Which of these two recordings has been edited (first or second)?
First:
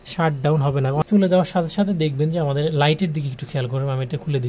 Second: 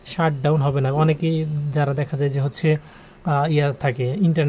first